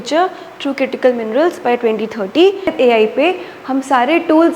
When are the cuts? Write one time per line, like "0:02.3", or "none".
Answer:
0:02.7